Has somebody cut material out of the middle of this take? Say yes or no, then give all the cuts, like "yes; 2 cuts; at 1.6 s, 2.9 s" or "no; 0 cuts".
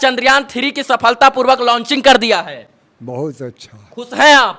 no; 0 cuts